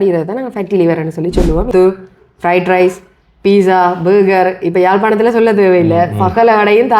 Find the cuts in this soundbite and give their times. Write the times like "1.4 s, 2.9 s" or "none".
1.7 s